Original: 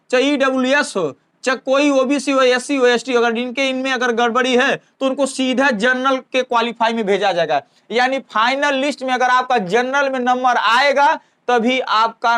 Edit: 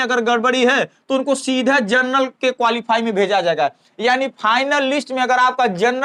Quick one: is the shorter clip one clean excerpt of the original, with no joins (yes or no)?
yes